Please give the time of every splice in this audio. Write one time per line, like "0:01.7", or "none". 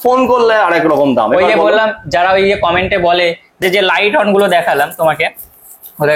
0:03.6